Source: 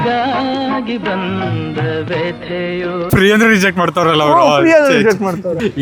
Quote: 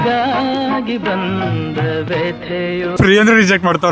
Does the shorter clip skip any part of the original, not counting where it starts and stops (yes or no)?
yes